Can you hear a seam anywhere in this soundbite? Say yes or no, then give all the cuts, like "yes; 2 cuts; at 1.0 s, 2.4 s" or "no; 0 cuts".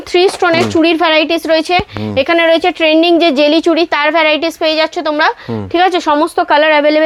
no; 0 cuts